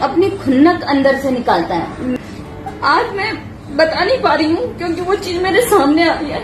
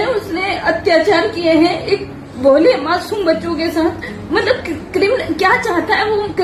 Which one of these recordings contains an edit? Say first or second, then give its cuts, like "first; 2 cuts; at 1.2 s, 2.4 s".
first; 1 cut; at 2.2 s